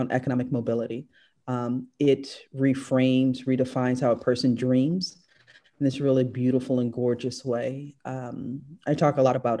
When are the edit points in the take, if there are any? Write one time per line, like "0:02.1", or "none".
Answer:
none